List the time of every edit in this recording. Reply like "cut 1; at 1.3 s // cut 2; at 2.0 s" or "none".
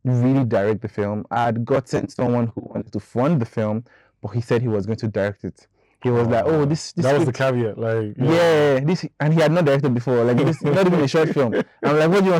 none